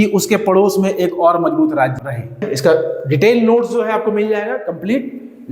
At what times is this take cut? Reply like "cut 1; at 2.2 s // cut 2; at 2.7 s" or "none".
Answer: cut 1; at 2.4 s